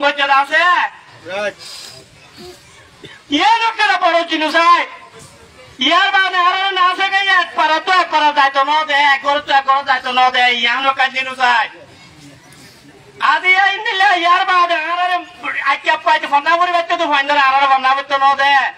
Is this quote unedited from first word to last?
yes; 0 cuts

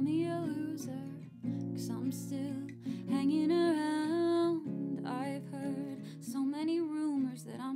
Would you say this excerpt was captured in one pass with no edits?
yes; 0 cuts

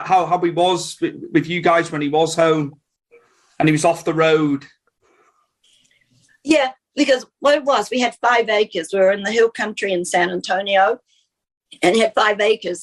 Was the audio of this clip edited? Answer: no; 0 cuts

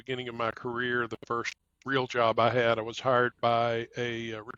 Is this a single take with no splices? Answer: yes; 0 cuts

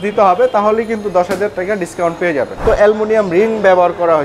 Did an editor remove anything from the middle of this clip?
yes; 1 cut; at 2.6 s

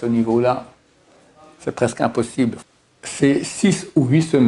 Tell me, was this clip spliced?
yes; 1 cut; at 2.6 s

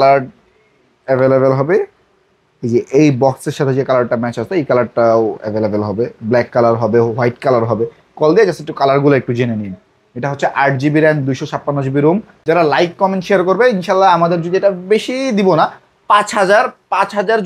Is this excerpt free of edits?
no; 1 cut; at 12.3 s

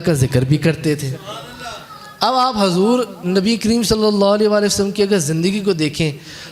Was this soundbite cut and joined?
no; 0 cuts

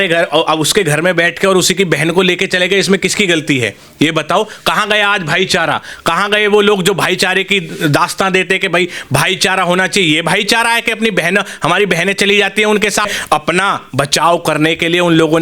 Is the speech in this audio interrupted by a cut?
yes; 1 cut; at 13.2 s

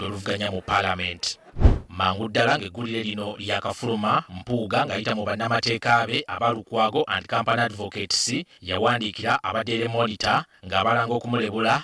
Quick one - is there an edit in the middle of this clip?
yes; 1 cut; at 1.4 s

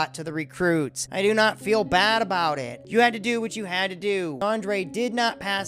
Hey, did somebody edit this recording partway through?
yes; 2 cuts; at 2.8 s, 4.4 s

